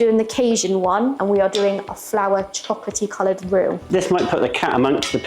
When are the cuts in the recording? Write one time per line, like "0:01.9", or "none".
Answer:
0:01.2

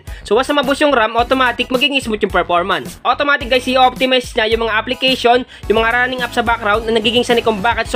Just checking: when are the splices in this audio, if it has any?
0:02.9

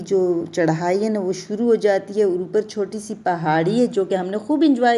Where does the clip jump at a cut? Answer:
none

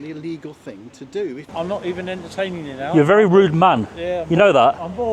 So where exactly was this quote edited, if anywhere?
0:01.4

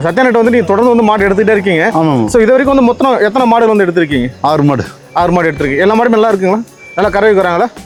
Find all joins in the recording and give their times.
none

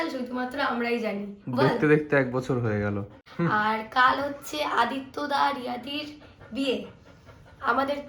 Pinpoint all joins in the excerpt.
0:03.2

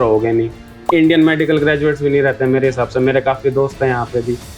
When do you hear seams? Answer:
none

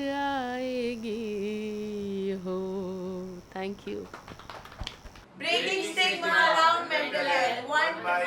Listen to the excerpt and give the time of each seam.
0:05.2

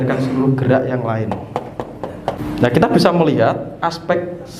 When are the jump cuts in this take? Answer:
0:02.4

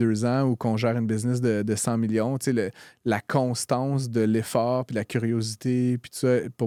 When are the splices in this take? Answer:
none

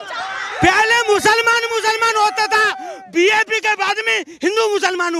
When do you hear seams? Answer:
none

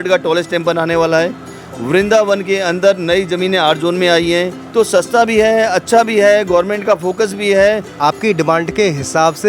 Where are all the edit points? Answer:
0:04.6
0:08.0

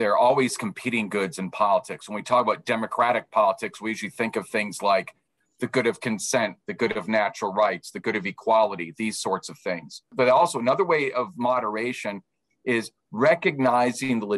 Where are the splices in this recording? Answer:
0:10.1

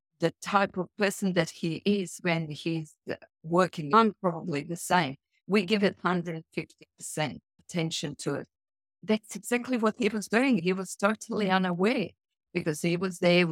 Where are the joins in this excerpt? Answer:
0:03.9
0:07.5
0:09.0
0:10.6

